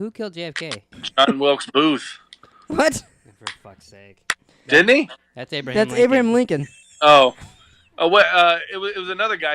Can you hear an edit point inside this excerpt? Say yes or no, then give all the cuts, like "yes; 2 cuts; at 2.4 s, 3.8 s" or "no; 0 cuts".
yes; 2 cuts; at 1.0 s, 4.5 s